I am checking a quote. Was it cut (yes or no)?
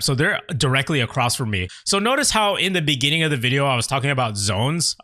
yes